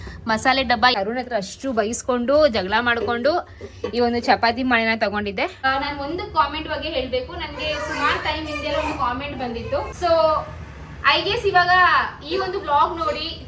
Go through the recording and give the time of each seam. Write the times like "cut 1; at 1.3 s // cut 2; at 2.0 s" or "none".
cut 1; at 0.9 s // cut 2; at 5.6 s // cut 3; at 9.9 s